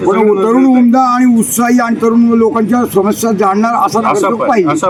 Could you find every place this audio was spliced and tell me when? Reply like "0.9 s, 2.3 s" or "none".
none